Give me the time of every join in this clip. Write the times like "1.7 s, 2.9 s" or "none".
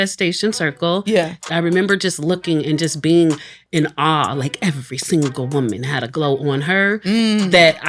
1.4 s

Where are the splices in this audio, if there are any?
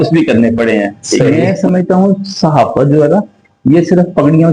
1.3 s

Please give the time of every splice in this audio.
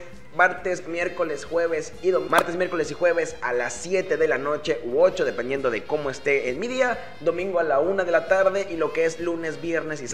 2.3 s

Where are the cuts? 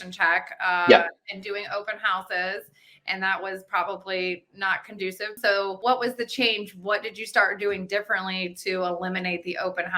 5.6 s

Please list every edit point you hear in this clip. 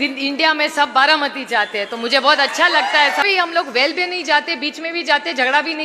3.2 s

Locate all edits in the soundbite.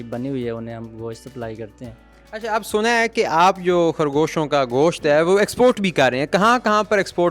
none

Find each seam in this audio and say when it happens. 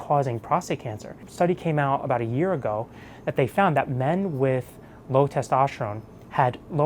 1.2 s

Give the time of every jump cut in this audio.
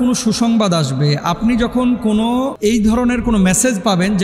none

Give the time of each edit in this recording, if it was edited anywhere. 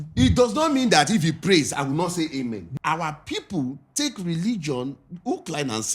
2.7 s

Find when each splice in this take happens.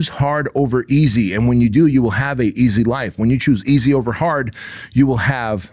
none

